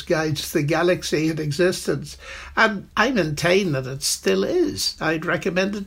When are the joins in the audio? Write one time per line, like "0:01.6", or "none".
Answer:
0:02.8